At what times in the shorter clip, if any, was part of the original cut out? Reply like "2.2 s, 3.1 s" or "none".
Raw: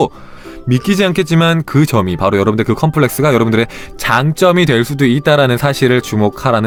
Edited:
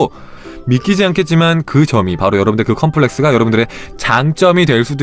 none